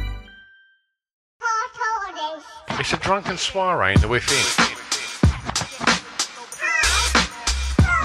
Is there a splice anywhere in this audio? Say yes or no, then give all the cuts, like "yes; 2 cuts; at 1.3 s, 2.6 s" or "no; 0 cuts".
yes; 1 cut; at 1.2 s